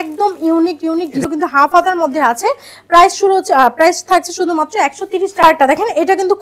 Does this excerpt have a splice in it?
yes; 2 cuts; at 1.2 s, 5.4 s

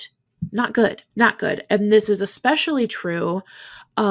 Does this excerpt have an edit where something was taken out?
yes; 1 cut; at 1.0 s

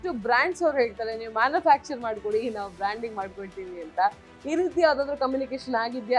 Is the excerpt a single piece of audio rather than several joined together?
yes; 0 cuts

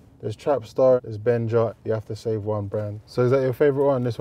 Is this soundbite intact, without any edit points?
no; 3 cuts; at 1.0 s, 1.8 s, 3.0 s

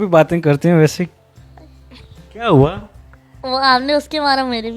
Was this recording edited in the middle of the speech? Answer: no; 0 cuts

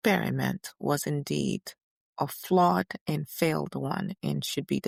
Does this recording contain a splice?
no; 0 cuts

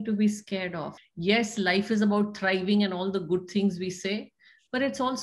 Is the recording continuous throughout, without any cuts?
no; 1 cut; at 0.9 s

